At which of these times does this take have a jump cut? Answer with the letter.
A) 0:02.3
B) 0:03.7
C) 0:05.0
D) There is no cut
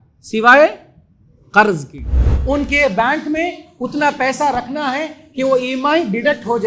A